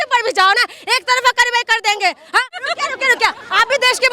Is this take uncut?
no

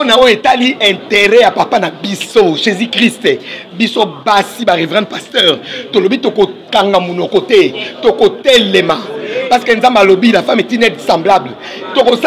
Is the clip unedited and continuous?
yes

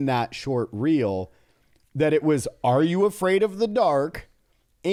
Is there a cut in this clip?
no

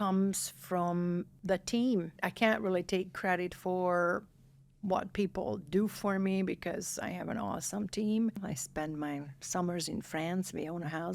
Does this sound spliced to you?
yes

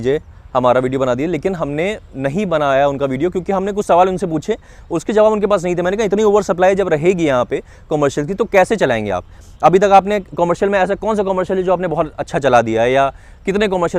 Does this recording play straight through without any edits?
yes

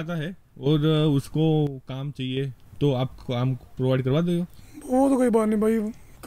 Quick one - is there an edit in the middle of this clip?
no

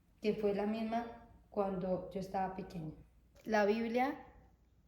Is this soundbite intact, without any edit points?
no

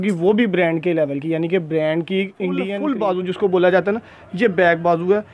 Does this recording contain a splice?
yes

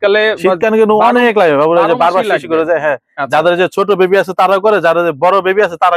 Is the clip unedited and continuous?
yes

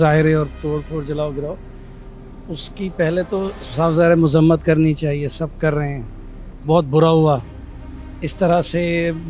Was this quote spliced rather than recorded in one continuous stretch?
no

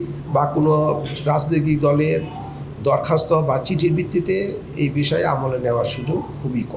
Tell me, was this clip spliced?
no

